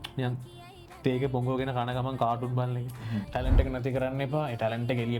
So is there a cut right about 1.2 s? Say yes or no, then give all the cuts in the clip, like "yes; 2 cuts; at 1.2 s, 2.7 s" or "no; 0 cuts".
no; 1 cut; at 3.3 s